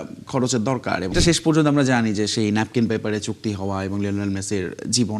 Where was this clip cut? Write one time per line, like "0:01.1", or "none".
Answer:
0:01.1